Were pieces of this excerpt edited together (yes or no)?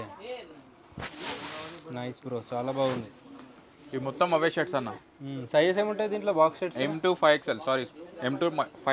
no